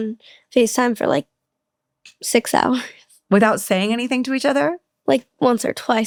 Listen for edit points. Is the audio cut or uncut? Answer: uncut